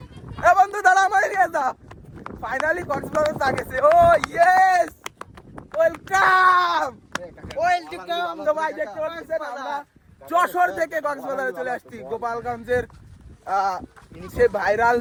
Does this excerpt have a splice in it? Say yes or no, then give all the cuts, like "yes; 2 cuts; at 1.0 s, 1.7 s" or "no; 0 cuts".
no; 0 cuts